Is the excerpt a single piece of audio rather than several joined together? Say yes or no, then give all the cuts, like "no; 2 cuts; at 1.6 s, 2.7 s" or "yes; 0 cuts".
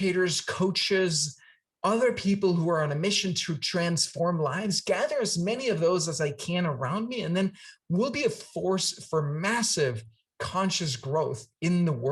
yes; 0 cuts